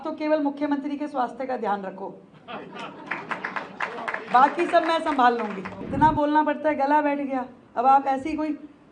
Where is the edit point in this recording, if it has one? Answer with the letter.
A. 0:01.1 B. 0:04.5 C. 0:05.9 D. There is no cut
C